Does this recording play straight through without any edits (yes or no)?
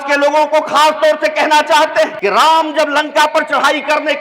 no